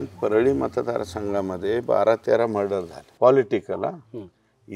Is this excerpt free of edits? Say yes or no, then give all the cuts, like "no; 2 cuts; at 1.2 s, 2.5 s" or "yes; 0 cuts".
no; 1 cut; at 3.0 s